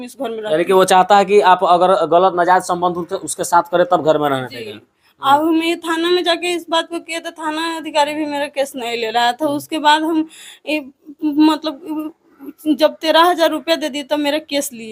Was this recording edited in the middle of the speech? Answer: no; 0 cuts

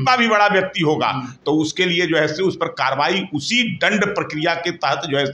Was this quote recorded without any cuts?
yes; 0 cuts

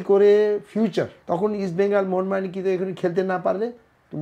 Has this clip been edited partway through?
yes; 1 cut; at 1.2 s

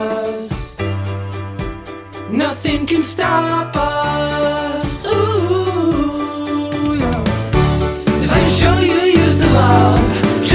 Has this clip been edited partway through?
no; 0 cuts

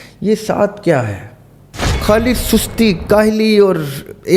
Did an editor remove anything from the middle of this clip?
yes; 1 cut; at 1.9 s

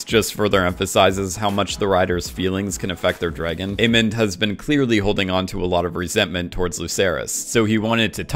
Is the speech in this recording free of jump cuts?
no; 1 cut; at 3.7 s

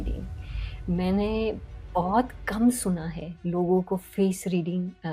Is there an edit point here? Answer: no; 0 cuts

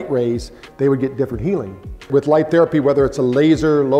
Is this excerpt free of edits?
no; 1 cut; at 2.1 s

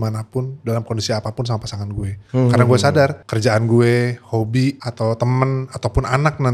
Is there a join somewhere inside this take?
yes; 3 cuts; at 2.1 s, 3.2 s, 4.9 s

